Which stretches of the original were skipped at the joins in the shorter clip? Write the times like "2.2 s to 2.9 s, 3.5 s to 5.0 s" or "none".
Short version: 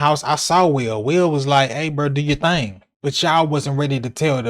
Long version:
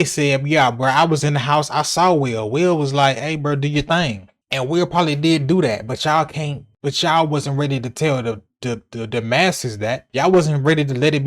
4.3 s to 6.6 s